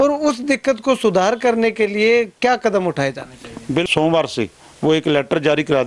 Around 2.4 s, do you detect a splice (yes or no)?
no